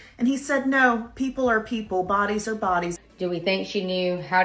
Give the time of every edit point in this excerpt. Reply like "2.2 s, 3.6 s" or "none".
3.0 s